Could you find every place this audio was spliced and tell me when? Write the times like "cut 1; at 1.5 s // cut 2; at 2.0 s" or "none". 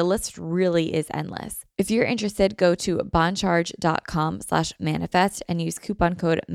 cut 1; at 1.6 s